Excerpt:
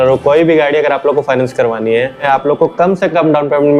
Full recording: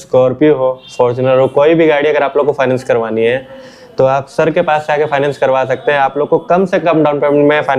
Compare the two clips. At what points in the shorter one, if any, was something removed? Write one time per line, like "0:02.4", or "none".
0:02.2